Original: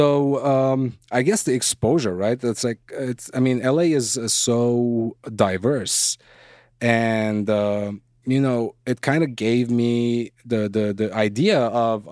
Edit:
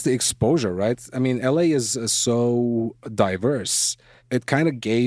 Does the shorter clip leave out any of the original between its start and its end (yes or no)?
yes